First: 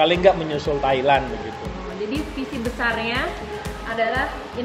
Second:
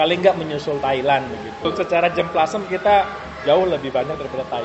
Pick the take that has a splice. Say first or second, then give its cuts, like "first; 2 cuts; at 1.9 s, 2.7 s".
second; 1 cut; at 1.7 s